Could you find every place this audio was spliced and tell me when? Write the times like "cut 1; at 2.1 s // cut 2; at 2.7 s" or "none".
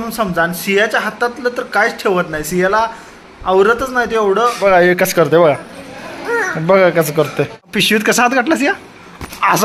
cut 1; at 4.6 s // cut 2; at 7.7 s